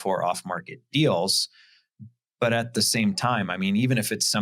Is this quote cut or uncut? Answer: uncut